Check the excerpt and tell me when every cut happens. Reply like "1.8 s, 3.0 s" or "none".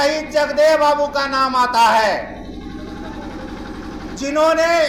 none

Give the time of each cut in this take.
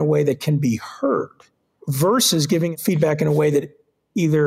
1.8 s, 2.7 s

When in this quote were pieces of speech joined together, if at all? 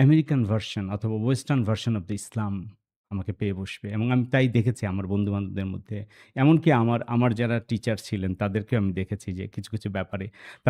none

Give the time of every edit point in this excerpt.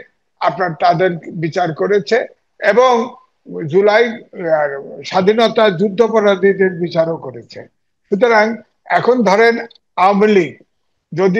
none

